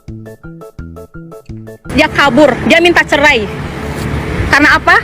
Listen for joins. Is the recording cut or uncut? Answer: cut